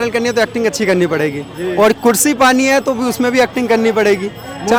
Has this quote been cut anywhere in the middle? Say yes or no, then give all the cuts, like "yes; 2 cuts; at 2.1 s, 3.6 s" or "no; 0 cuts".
no; 0 cuts